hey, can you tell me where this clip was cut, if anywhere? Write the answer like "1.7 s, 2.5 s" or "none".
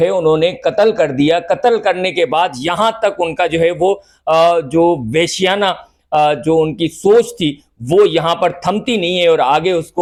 none

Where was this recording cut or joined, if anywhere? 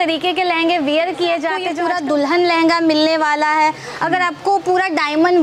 1.7 s

